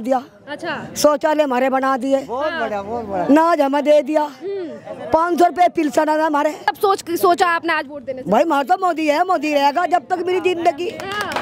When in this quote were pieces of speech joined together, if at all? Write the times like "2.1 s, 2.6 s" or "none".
6.8 s